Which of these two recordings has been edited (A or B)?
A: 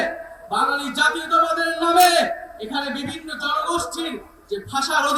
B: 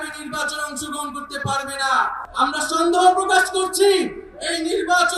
B